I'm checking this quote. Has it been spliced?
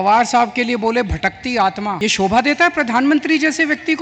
yes; 1 cut; at 2.0 s

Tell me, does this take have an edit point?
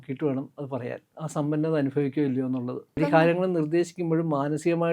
yes; 2 cuts; at 1.1 s, 3.0 s

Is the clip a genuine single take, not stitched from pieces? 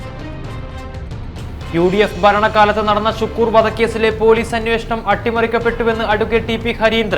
no; 1 cut; at 1.3 s

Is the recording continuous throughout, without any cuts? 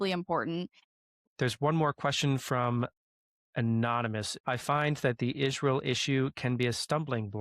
no; 2 cuts; at 1.0 s, 4.3 s

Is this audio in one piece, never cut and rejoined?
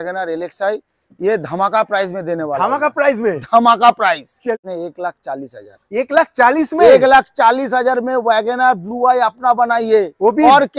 no; 1 cut; at 4.5 s

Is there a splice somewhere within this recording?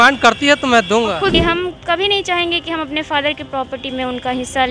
yes; 1 cut; at 1.4 s

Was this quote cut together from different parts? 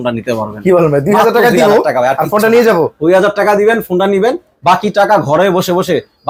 no; 0 cuts

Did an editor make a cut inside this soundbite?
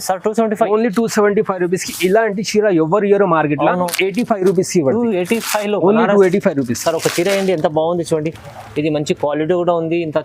yes; 1 cut; at 3.9 s

